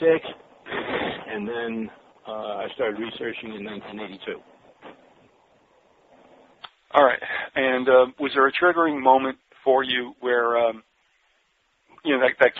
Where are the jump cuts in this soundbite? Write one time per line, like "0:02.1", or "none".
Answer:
0:05.6